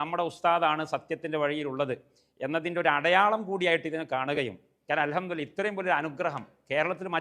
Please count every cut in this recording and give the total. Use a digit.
1